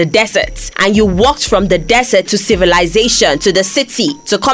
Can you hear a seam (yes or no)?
no